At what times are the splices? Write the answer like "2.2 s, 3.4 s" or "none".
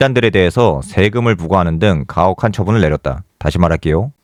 none

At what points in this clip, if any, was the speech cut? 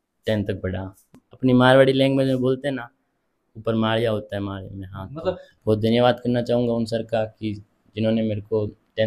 1.1 s, 5.5 s

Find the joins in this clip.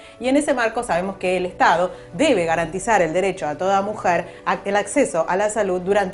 none

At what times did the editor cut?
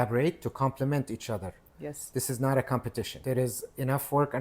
3.1 s

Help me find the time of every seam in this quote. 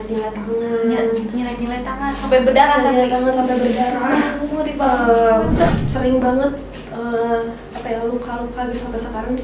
5.7 s

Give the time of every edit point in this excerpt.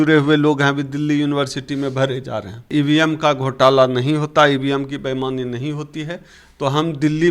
2.7 s

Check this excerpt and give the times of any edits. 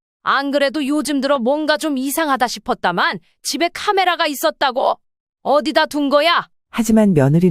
6.6 s

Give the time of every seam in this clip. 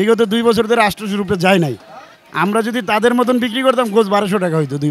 none

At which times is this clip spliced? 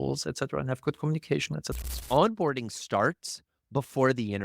2.0 s

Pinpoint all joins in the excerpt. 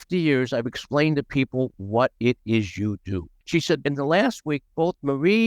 1.8 s, 3.3 s

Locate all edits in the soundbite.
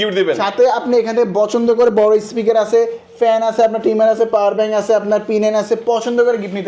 none

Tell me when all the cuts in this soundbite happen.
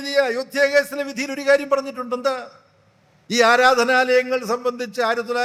none

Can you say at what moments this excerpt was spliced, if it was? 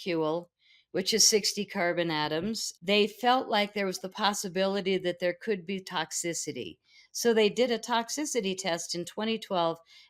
2.7 s

